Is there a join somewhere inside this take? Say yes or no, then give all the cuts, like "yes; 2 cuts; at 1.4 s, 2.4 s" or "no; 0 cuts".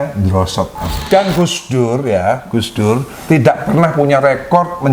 yes; 1 cut; at 1.0 s